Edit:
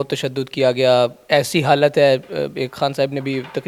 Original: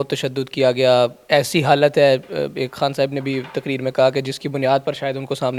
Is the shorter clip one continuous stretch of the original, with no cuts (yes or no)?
yes